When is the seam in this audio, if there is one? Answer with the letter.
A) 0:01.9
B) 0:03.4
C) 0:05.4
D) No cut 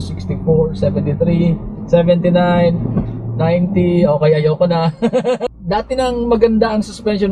C